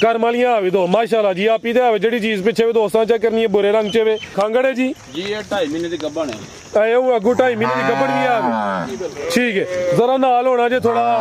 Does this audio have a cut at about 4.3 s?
yes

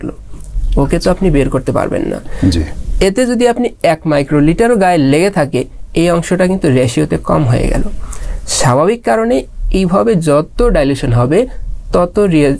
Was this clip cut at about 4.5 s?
no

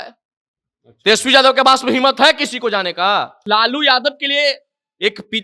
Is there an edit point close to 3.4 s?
yes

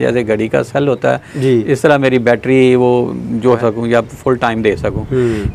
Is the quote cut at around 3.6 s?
yes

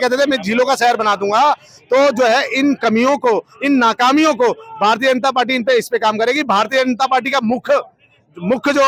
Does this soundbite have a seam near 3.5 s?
no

